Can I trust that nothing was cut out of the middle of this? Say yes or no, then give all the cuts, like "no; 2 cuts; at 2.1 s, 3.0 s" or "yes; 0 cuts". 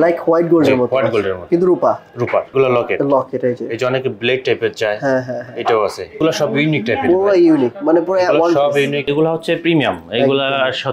no; 3 cuts; at 2.5 s, 6.2 s, 9.1 s